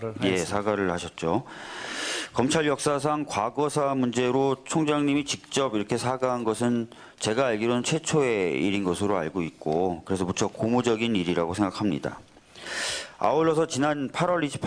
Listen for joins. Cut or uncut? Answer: uncut